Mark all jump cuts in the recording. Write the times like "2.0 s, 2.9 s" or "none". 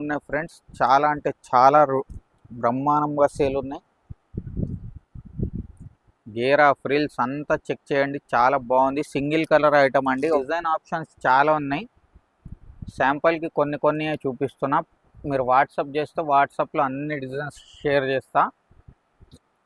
10.4 s